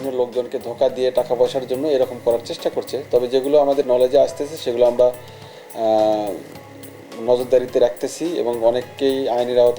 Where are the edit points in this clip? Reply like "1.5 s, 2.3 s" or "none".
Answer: none